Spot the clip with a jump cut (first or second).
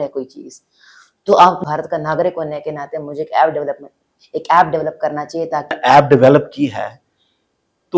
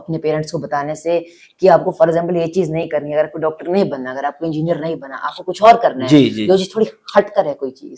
first